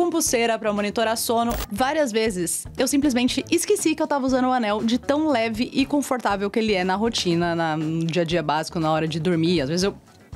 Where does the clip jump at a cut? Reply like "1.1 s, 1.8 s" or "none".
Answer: 1.6 s